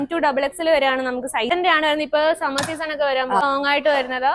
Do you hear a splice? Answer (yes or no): yes